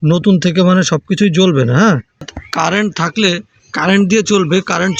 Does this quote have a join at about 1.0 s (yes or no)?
no